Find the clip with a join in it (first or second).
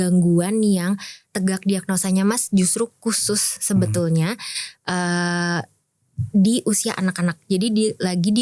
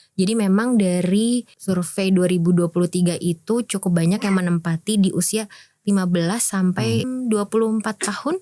second